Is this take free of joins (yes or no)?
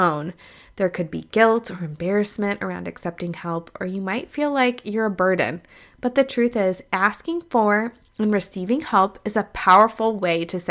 yes